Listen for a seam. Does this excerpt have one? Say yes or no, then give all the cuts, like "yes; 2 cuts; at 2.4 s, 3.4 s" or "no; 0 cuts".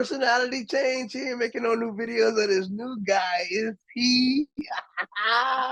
no; 0 cuts